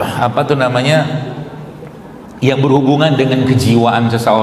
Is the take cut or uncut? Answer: uncut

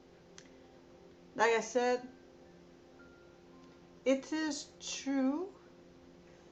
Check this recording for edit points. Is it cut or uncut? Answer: uncut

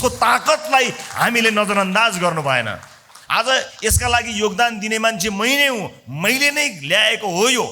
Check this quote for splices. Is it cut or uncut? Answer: uncut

